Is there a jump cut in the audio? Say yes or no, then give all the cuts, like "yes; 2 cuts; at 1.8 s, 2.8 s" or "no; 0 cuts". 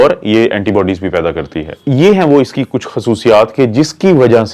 yes; 1 cut; at 1.7 s